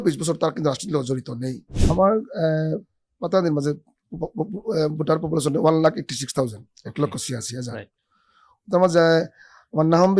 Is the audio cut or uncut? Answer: cut